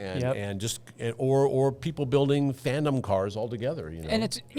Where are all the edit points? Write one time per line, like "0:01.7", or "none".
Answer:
none